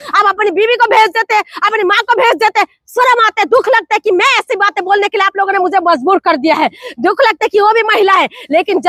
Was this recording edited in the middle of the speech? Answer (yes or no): no